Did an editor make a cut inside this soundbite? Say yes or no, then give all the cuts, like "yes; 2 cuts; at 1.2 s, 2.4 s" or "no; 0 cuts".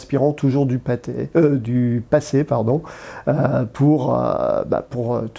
no; 0 cuts